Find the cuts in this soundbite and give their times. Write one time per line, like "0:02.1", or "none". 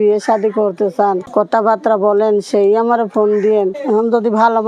0:01.2
0:03.8

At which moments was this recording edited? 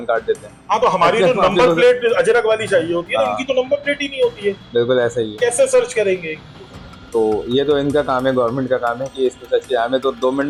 none

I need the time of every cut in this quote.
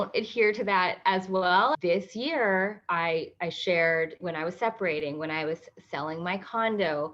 0:01.8
0:04.2

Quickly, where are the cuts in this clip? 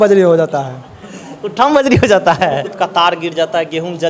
0:02.7

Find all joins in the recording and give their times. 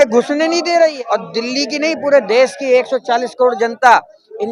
0:01.0

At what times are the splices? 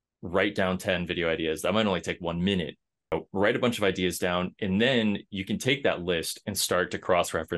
0:03.1

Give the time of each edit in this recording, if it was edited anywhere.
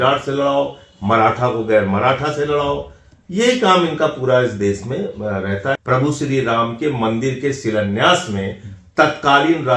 0:05.8

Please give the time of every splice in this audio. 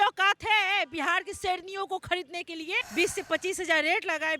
0:02.8

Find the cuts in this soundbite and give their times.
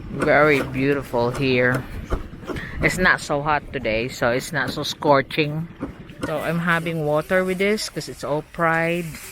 0:06.3

